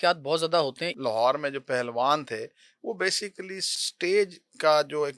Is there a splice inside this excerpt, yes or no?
yes